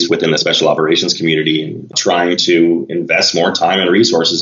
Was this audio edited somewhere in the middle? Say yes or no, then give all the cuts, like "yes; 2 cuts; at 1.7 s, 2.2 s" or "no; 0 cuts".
yes; 1 cut; at 1.9 s